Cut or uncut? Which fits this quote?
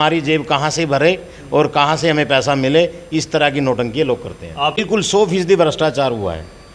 cut